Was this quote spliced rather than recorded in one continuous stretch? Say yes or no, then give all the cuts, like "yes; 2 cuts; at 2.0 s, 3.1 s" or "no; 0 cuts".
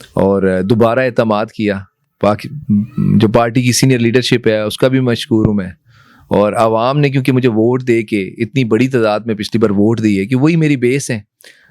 no; 0 cuts